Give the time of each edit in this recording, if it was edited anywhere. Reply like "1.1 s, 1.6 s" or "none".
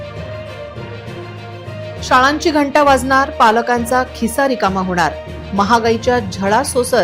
1.0 s